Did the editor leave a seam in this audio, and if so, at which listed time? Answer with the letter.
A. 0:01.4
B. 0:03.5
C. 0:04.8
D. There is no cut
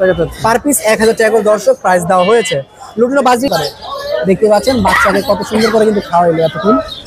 B